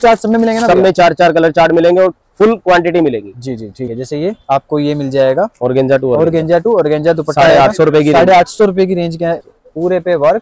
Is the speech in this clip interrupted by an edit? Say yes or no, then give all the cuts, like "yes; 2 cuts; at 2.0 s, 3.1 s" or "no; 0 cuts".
yes; 2 cuts; at 3.9 s, 9.4 s